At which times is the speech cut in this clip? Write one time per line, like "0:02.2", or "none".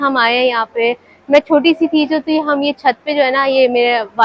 none